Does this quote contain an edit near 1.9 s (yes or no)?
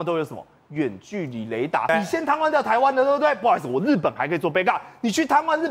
yes